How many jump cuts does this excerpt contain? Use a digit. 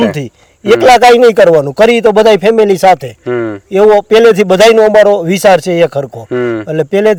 0